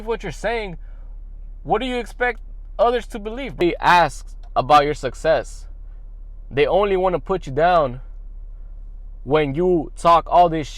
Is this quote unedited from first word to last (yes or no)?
no